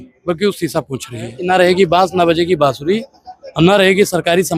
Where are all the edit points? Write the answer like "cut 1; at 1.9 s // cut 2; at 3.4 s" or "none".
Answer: cut 1; at 1.3 s